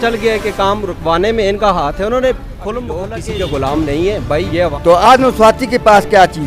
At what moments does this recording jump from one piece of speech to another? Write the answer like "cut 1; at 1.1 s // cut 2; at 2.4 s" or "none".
cut 1; at 3.1 s // cut 2; at 4.7 s